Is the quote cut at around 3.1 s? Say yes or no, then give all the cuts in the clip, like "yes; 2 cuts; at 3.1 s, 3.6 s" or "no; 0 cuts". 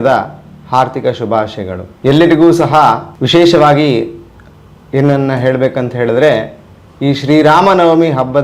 yes; 2 cuts; at 1.8 s, 3.1 s